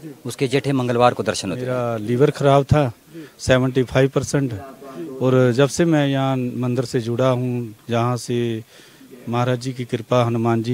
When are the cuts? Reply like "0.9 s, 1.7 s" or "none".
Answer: 1.7 s